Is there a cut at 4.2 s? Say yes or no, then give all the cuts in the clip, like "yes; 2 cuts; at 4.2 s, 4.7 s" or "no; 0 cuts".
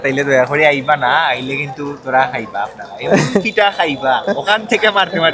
no; 0 cuts